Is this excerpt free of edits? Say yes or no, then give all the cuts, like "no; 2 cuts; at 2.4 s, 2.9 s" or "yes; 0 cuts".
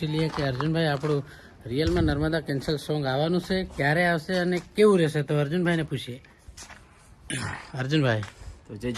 yes; 0 cuts